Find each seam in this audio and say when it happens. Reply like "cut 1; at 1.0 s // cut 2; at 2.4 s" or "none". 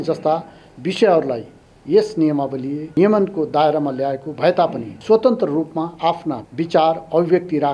cut 1; at 2.9 s // cut 2; at 4.9 s // cut 3; at 6.5 s